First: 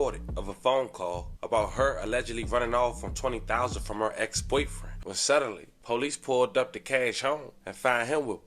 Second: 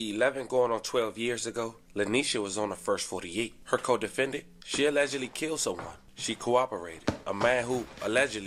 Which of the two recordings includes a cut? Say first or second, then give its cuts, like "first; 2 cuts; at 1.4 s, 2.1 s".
first; 1 cut; at 4.9 s